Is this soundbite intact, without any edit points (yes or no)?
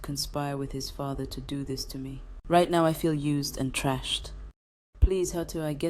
no